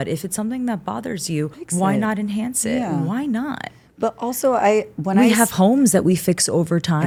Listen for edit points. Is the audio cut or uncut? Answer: uncut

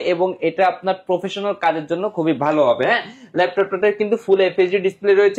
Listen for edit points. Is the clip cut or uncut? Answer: uncut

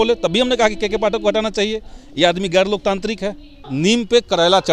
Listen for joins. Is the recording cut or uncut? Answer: cut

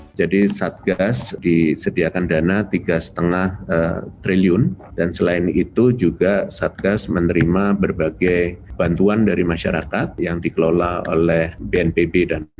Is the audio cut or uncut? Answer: cut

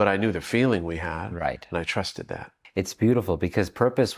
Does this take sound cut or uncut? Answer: cut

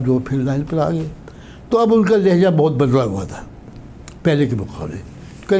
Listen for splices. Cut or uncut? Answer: uncut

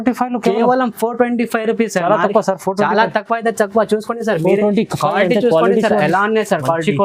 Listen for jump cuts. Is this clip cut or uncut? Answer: uncut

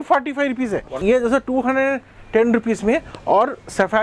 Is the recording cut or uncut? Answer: cut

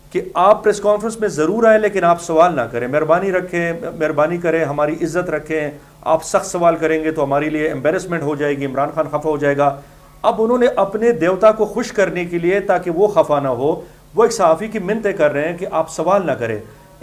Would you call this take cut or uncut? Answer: uncut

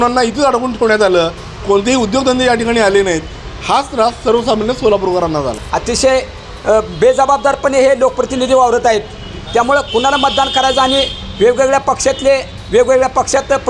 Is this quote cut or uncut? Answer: cut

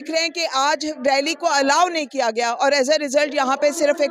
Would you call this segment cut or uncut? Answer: uncut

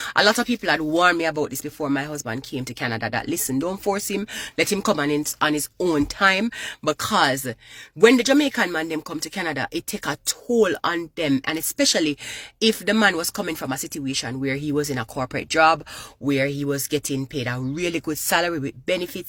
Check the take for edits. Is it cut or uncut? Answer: uncut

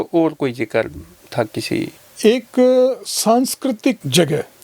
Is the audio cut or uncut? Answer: cut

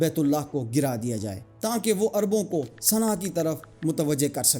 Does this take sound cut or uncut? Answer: uncut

